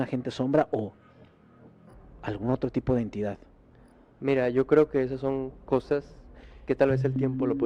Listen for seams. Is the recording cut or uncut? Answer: uncut